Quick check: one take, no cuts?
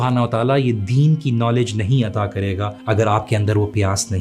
no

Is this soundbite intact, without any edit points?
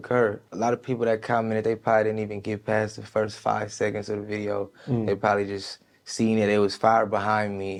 yes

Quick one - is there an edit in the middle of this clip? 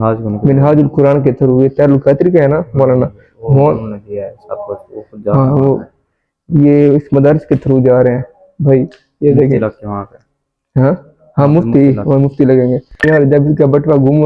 yes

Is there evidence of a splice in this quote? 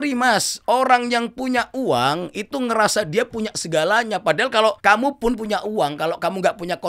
yes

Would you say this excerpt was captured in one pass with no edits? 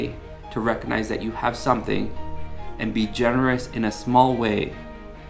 yes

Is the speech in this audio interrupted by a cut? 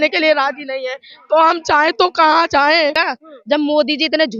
yes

